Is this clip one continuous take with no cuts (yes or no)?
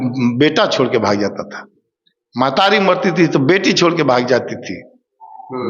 yes